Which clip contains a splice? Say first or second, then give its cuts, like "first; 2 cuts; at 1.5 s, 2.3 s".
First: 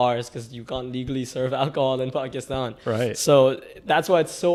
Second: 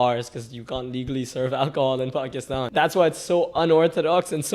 second; 1 cut; at 2.6 s